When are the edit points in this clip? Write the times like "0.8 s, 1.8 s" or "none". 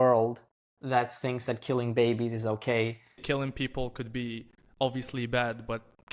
3.2 s